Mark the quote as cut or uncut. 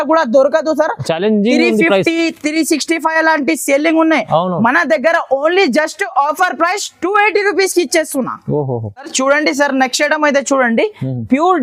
uncut